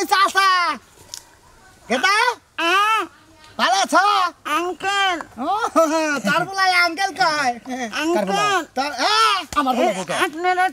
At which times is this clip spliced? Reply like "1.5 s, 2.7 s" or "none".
none

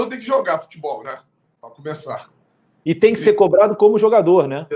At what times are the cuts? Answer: none

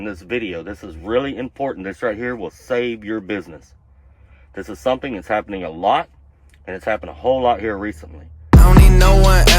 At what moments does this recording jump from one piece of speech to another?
8.3 s

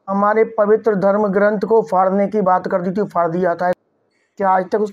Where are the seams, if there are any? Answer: 3.8 s

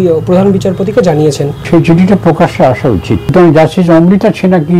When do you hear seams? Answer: 1.5 s, 3.3 s

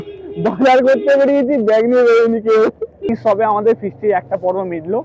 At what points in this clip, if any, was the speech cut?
3.1 s

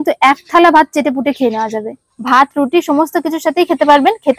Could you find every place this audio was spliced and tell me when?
2.1 s

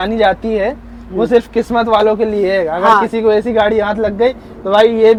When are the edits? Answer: none

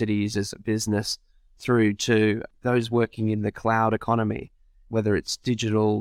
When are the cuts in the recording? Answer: 2.5 s

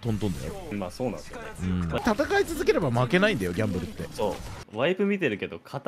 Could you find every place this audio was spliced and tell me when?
2.0 s, 4.6 s

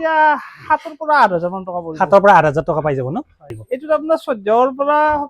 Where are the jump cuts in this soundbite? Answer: 3.4 s

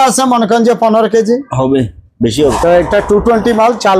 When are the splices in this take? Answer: 2.5 s

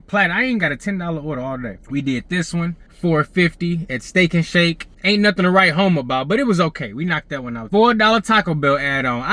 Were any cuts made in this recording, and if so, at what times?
1.7 s, 2.8 s, 4.9 s

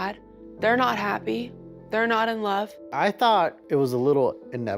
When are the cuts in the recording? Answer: 2.8 s, 3.6 s

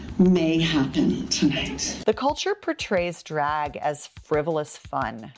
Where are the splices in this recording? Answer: 1.9 s

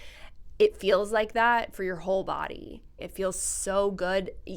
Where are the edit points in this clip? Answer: 3.0 s

